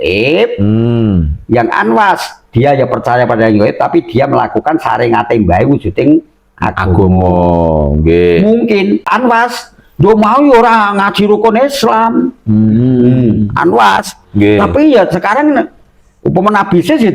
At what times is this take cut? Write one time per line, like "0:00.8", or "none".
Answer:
0:09.1